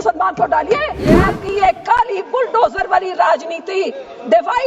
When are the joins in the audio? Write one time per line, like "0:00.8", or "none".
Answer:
0:01.2